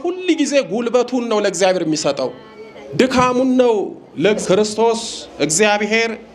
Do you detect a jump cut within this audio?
yes; 1 cut; at 4.4 s

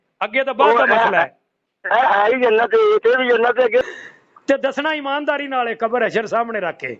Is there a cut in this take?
yes; 1 cut; at 3.8 s

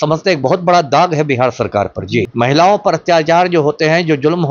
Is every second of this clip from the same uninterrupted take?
no; 1 cut; at 2.3 s

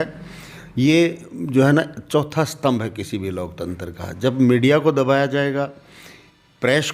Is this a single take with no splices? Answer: yes; 0 cuts

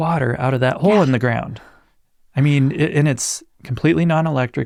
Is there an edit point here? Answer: no; 0 cuts

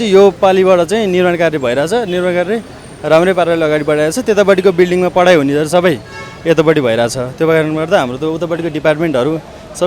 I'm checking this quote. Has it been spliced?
no; 0 cuts

